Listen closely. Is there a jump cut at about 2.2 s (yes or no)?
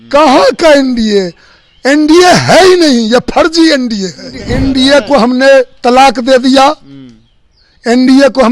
no